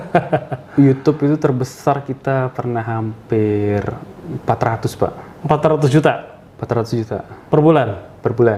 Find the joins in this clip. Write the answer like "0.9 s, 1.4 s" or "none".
none